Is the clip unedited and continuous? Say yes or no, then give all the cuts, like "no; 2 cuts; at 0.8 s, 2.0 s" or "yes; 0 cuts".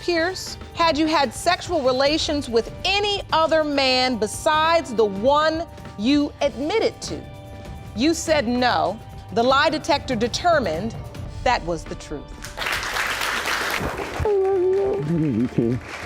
no; 1 cut; at 13.8 s